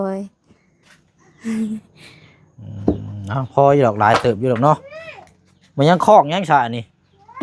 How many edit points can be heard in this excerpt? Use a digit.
0